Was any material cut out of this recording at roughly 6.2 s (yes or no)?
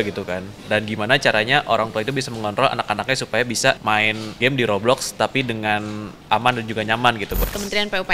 yes